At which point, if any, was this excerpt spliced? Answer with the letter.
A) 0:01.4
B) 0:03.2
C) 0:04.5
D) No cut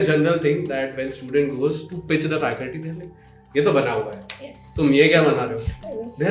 D